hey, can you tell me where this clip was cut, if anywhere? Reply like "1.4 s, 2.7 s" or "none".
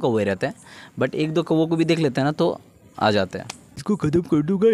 3.8 s

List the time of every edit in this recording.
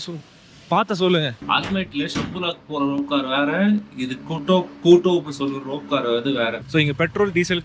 1.4 s, 6.6 s

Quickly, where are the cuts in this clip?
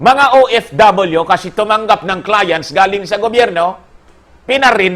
none

